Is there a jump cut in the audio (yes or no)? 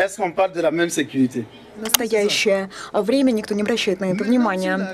yes